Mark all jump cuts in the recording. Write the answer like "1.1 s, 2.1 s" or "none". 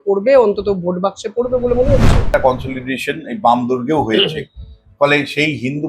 2.3 s